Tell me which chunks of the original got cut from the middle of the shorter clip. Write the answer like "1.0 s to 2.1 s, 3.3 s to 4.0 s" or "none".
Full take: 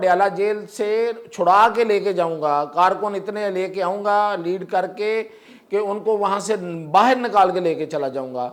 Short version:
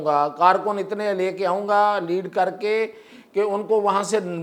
none